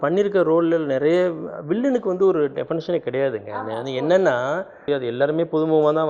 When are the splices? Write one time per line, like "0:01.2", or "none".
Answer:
0:04.8